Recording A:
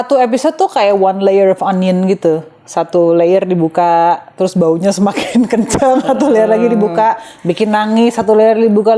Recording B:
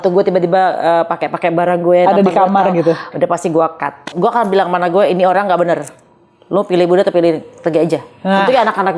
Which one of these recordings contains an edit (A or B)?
B